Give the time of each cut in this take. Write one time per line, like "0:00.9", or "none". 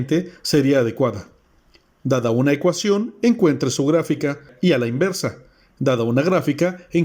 0:04.5